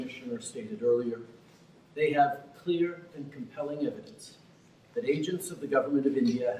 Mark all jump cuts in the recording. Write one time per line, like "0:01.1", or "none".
none